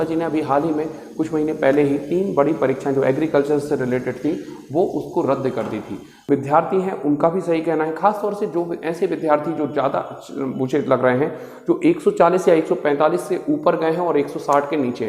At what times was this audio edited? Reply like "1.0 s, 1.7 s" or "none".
6.2 s